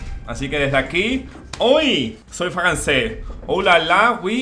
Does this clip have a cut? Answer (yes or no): yes